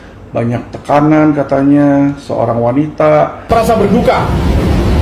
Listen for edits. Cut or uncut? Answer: cut